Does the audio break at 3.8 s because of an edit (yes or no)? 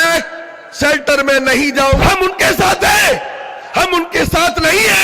no